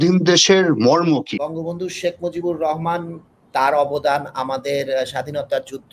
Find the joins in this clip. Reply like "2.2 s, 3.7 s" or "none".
1.4 s